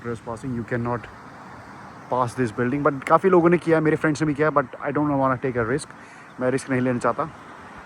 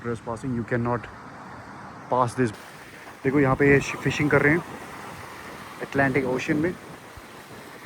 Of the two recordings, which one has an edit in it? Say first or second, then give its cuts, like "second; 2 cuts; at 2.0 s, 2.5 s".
second; 1 cut; at 2.5 s